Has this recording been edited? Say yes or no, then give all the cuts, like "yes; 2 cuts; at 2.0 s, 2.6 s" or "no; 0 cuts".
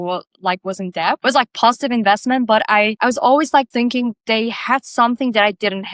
yes; 3 cuts; at 1.2 s, 2.9 s, 3.7 s